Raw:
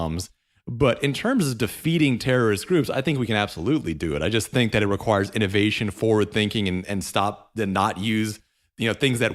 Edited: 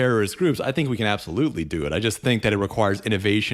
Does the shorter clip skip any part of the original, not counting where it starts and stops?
no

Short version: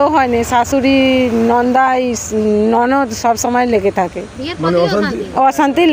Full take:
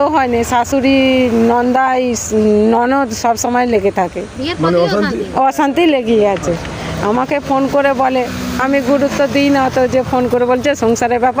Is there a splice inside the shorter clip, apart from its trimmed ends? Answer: no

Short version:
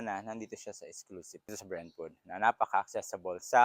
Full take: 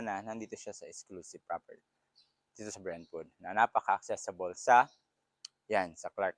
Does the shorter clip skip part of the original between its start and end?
yes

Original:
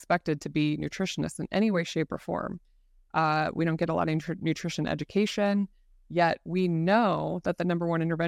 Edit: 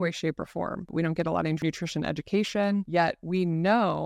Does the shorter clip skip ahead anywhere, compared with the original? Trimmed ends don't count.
yes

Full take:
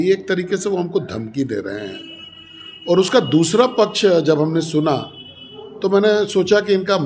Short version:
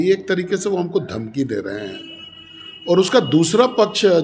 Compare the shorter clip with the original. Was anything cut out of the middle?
no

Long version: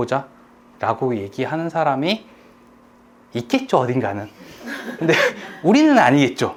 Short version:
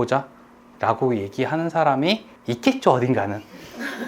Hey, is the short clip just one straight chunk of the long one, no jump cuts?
no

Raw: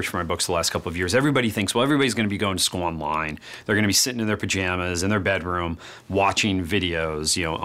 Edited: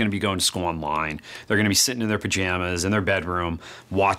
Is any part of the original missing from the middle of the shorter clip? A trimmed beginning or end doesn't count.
no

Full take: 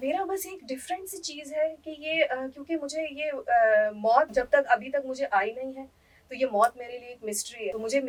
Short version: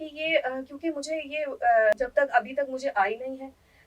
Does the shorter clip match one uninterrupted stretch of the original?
no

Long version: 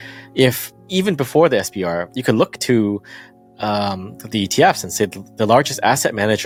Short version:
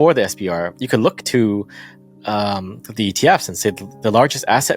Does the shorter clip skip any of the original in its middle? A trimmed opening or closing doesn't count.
no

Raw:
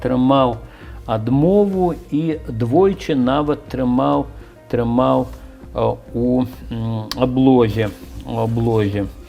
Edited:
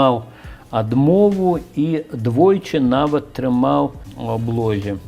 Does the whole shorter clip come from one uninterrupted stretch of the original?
no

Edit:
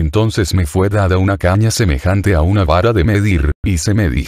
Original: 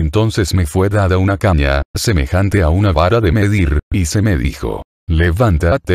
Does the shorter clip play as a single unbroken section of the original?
no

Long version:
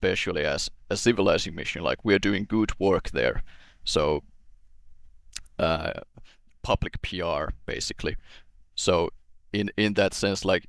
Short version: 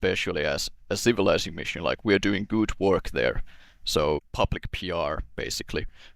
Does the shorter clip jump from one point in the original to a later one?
yes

